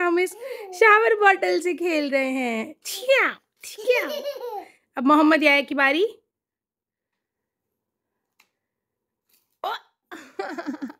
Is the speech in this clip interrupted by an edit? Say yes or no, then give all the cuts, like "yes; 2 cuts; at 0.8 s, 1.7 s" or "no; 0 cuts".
no; 0 cuts